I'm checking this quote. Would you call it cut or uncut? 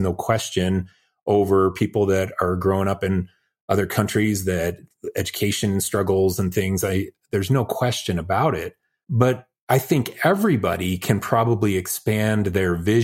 cut